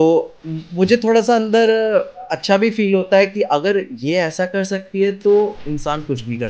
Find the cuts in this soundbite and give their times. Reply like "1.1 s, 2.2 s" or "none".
5.6 s